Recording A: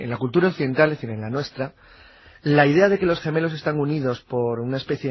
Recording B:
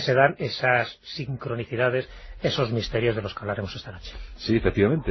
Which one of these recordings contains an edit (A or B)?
A